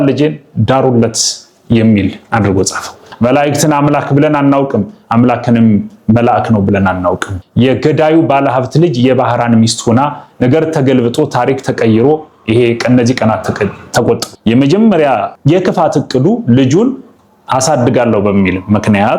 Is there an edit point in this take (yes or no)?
yes